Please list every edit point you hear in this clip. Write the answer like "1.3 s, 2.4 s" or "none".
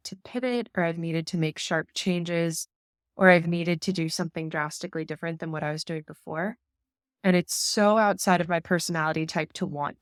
none